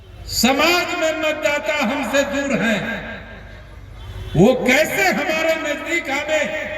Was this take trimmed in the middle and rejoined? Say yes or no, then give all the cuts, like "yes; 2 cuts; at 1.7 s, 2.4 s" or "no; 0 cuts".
no; 0 cuts